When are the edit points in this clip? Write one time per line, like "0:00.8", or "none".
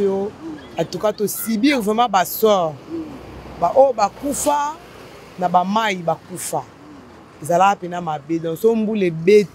none